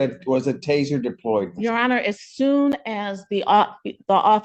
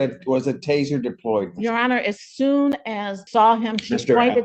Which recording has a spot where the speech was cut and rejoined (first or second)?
second